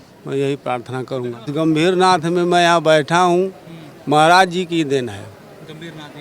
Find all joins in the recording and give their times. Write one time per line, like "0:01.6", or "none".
0:01.5